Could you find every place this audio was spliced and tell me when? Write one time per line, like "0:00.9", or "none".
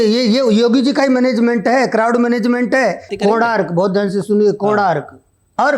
0:03.1